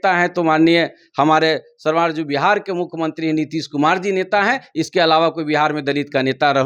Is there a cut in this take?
no; 0 cuts

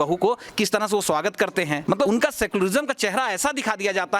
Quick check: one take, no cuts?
no; 1 cut; at 1.9 s

